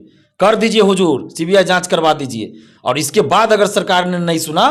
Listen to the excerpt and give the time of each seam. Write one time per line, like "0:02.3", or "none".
none